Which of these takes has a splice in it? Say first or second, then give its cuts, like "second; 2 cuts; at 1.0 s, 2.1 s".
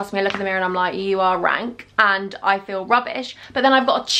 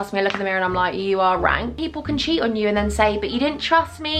second; 1 cut; at 1.8 s